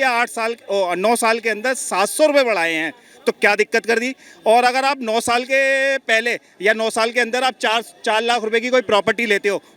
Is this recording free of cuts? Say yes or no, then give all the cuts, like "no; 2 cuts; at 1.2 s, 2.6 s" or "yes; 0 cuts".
yes; 0 cuts